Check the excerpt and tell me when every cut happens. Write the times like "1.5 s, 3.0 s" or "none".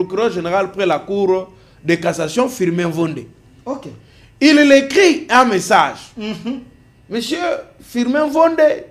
none